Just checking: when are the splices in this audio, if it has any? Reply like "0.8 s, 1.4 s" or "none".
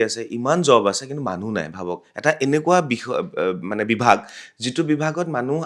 none

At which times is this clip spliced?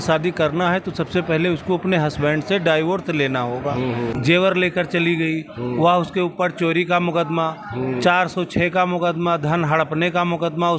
4.2 s

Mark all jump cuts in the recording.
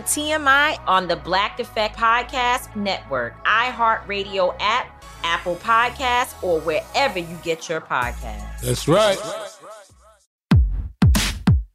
10.6 s

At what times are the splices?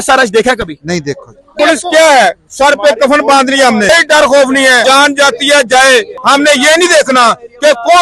1.5 s, 3.9 s, 4.8 s, 6.1 s

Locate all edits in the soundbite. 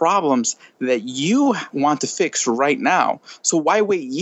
1.7 s

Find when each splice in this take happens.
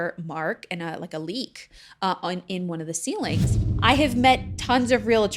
3.6 s

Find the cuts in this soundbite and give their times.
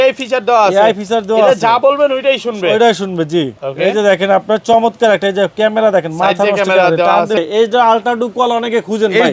7.4 s

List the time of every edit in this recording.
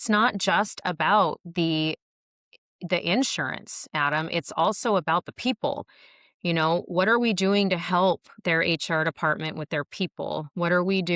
none

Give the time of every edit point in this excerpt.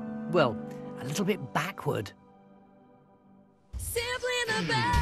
none

